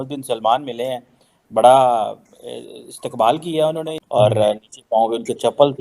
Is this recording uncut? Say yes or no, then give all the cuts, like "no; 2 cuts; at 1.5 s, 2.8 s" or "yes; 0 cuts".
no; 1 cut; at 4.0 s